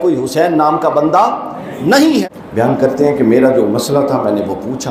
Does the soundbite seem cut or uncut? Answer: cut